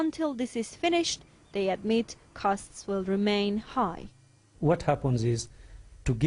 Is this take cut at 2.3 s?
yes; 1 cut; at 2.3 s

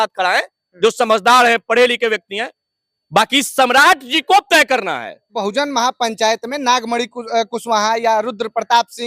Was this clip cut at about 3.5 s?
no; 1 cut; at 5.4 s

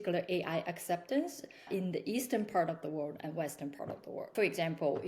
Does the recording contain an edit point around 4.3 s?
yes; 2 cuts; at 1.7 s, 4.3 s

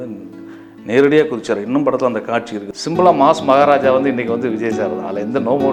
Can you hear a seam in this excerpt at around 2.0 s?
no; 0 cuts

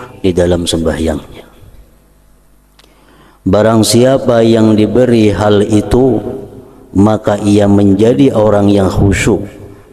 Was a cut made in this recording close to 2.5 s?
yes; 1 cut; at 2.5 s

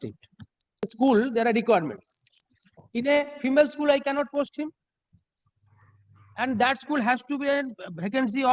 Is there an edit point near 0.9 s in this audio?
yes; 1 cut; at 0.9 s

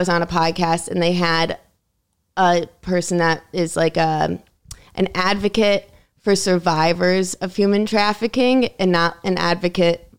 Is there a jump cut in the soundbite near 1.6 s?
no; 0 cuts

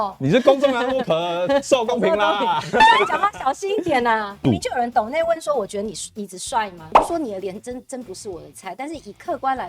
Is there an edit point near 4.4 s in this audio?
yes; 2 cuts; at 4.4 s, 6.9 s

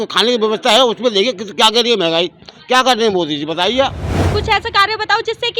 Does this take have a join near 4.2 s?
yes; 1 cut; at 4.2 s

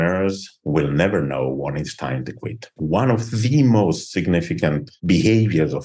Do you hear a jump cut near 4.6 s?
no; 1 cut; at 2.7 s

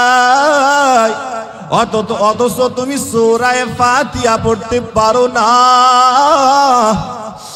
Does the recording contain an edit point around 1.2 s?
no; 0 cuts

